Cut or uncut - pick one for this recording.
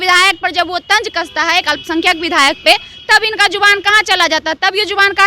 uncut